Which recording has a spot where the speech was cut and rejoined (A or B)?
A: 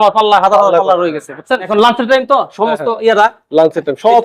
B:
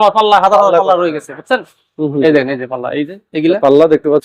A